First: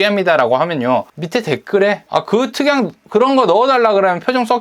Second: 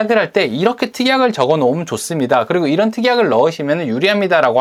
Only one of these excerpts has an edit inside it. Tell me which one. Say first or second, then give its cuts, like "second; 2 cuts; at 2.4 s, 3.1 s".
first; 1 cut; at 2.0 s